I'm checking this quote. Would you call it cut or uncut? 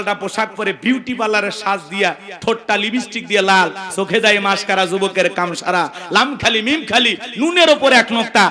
uncut